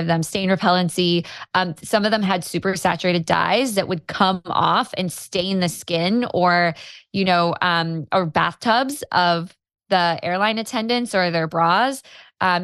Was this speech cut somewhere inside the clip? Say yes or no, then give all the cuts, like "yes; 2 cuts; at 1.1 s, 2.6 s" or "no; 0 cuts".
no; 0 cuts